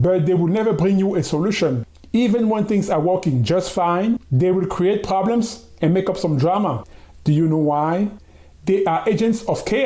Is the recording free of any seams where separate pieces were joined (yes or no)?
no